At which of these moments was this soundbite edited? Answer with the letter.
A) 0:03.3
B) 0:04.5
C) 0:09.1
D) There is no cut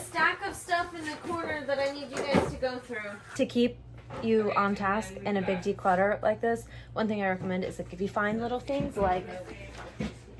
A